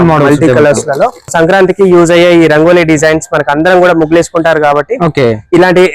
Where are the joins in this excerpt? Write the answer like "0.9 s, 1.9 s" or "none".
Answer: 1.3 s